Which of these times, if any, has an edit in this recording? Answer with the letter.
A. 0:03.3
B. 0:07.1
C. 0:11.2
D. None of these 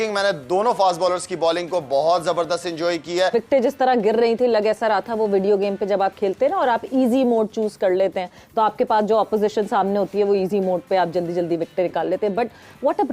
A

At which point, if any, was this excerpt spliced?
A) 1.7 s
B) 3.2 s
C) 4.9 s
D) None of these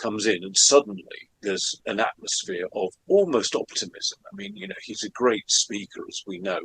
A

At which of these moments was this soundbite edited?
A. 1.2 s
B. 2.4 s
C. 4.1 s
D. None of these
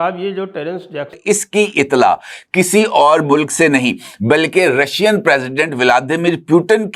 A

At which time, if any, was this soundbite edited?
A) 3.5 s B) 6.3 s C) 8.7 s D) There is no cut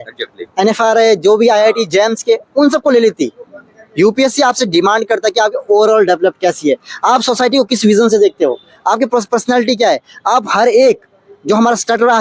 D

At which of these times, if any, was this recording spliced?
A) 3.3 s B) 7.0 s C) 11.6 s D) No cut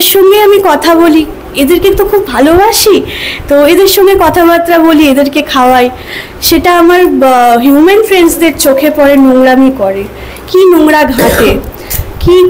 D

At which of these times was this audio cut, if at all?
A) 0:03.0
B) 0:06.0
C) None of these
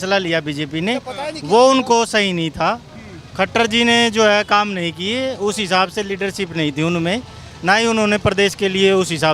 C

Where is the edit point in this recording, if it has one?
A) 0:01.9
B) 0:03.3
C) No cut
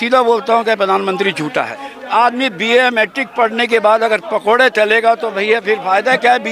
A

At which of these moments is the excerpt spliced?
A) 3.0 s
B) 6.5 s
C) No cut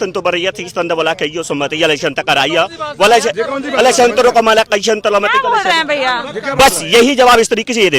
C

